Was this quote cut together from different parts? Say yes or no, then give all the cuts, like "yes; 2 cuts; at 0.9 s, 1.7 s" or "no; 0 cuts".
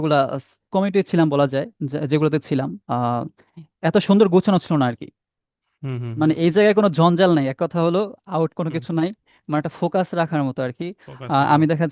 no; 0 cuts